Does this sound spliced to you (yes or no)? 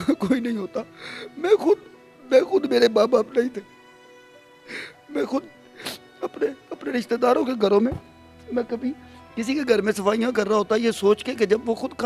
no